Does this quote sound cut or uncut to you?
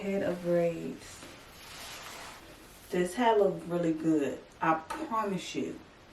uncut